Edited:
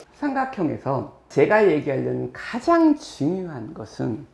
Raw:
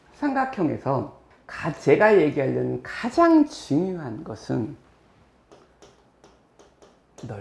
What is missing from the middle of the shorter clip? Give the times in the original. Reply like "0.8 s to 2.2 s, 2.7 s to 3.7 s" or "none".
1.2 s to 1.7 s